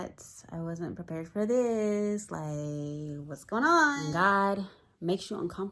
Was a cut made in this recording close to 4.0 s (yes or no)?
yes